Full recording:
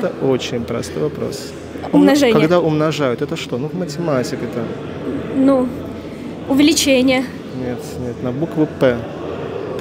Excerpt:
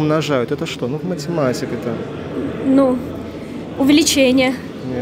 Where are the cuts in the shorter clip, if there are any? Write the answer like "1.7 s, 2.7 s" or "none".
none